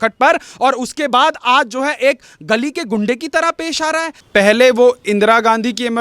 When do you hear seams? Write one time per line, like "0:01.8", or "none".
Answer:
0:04.1

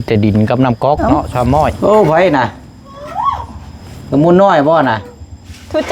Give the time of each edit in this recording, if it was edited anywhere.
0:01.8

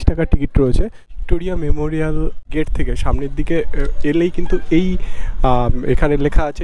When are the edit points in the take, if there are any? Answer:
0:01.0
0:02.4

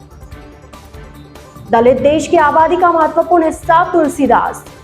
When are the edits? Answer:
0:01.3

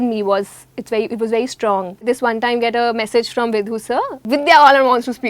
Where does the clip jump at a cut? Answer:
0:02.0
0:04.2

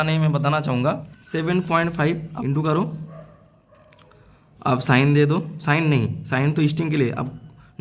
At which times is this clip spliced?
0:01.1
0:02.3

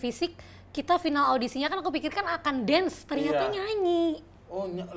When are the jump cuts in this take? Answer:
none

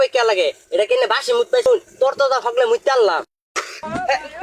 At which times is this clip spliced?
0:01.7

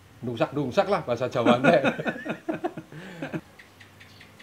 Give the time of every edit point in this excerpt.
0:03.4

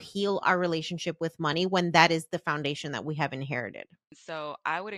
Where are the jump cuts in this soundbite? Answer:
0:04.1

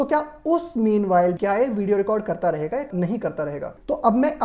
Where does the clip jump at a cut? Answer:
0:01.4
0:03.4

